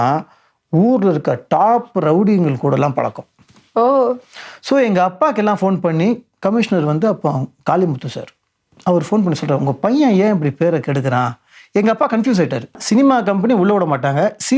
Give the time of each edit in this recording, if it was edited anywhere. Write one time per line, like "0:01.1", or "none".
0:12.8